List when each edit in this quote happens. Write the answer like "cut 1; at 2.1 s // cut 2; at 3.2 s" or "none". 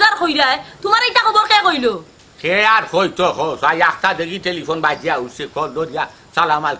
none

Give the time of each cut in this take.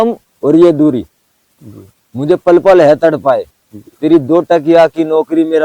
none

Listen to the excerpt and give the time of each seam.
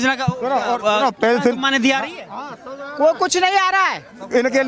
none

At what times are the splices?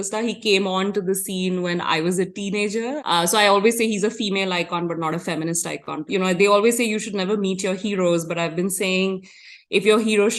cut 1; at 3.0 s // cut 2; at 6.0 s

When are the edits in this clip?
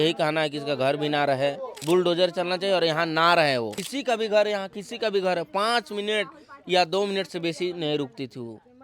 cut 1; at 1.8 s // cut 2; at 3.9 s

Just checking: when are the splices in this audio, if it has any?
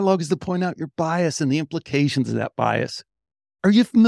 none

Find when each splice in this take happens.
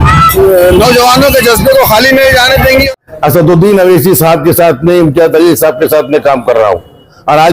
cut 1; at 2.9 s

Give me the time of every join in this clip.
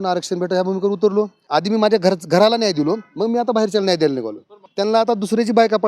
cut 1; at 1.4 s // cut 2; at 4.6 s

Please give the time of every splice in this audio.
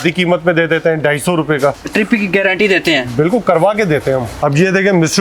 cut 1; at 1.8 s // cut 2; at 4.3 s

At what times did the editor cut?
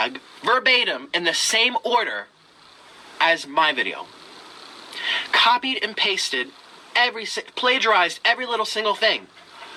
none

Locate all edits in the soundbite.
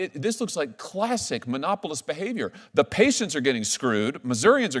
none

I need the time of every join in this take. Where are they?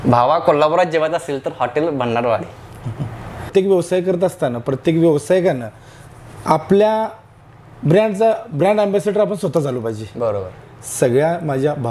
cut 1; at 3.5 s // cut 2; at 10.7 s

